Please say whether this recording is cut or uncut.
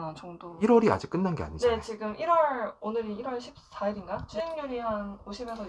uncut